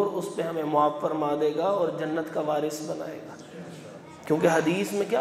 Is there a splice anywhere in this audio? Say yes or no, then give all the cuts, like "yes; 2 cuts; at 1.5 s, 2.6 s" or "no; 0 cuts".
no; 0 cuts